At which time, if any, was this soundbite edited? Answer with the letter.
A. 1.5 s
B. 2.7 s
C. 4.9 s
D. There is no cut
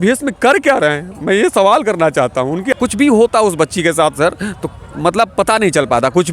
B